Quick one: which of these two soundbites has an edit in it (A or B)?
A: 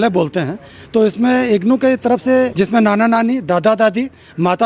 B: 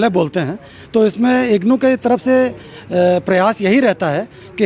A